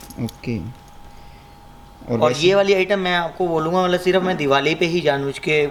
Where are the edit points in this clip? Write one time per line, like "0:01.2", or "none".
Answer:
none